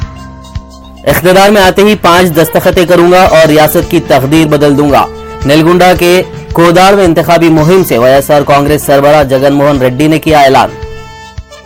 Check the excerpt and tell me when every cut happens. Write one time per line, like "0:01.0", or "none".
none